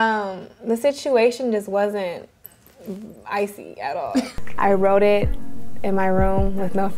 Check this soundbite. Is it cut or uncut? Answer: cut